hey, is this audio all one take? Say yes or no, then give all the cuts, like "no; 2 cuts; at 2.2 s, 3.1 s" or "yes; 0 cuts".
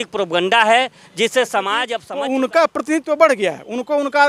no; 1 cut; at 2.0 s